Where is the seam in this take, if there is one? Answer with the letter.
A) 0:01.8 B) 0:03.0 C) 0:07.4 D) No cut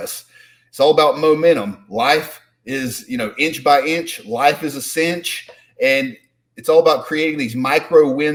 D